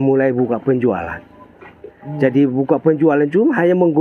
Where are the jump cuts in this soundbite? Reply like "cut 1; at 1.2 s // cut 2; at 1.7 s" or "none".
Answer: none